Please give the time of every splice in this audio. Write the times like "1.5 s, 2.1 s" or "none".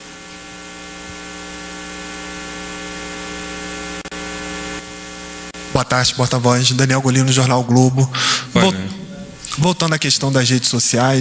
4.8 s

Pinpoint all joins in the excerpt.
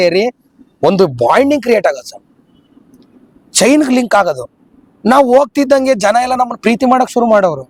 none

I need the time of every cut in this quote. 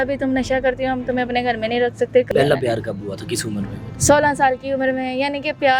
2.3 s, 3.9 s

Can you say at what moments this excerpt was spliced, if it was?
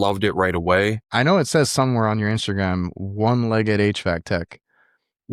1.0 s

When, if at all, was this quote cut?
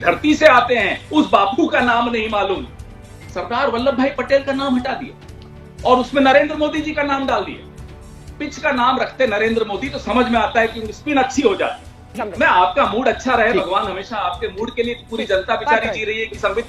2.9 s, 12.2 s

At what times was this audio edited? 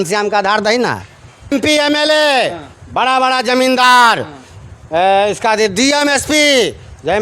1.5 s

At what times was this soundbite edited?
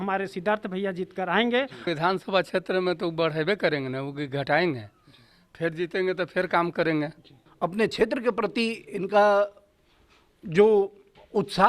1.8 s, 7.4 s

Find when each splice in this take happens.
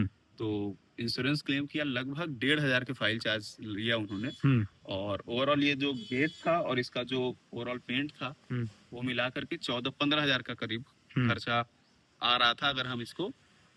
none

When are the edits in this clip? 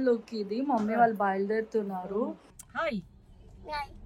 2.5 s

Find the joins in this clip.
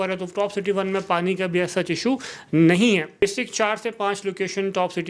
3.2 s

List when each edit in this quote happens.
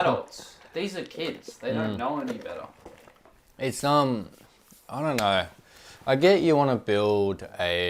none

